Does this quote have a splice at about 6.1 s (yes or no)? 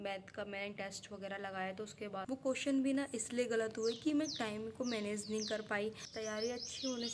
yes